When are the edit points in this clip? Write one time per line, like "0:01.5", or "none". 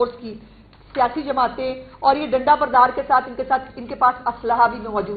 none